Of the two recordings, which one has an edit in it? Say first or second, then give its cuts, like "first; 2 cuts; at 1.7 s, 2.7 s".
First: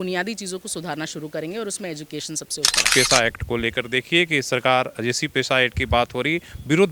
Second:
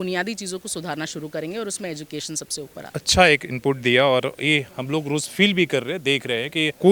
first; 1 cut; at 2.9 s